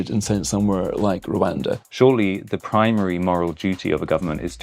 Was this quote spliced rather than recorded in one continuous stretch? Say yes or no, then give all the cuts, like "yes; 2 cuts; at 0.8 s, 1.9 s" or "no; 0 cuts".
yes; 1 cut; at 1.8 s